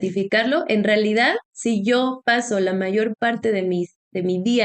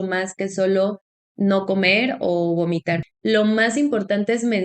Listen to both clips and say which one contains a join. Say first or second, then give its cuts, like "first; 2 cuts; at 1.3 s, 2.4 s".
second; 1 cut; at 3.1 s